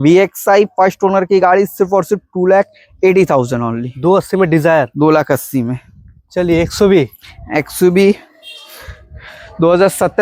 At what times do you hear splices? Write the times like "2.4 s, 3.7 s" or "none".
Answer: none